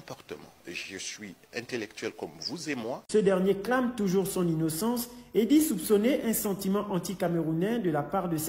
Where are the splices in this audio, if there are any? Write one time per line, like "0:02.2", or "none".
0:02.9

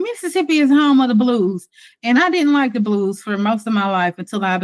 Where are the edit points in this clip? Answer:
none

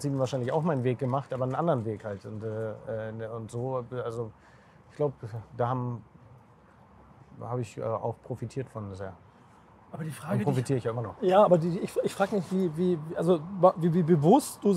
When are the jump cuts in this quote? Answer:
none

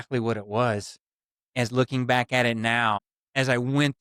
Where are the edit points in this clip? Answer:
none

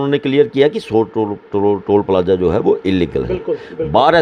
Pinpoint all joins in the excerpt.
none

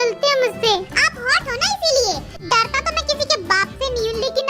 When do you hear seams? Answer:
0:02.3

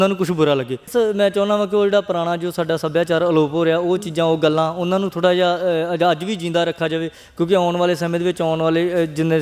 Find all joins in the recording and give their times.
0:00.9

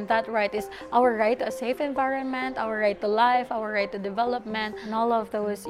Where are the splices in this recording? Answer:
0:04.8

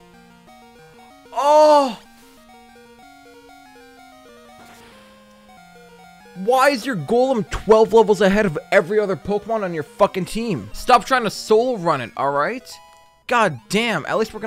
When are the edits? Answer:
0:10.7

